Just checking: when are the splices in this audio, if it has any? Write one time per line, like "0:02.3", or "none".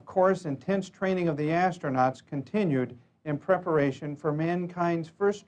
none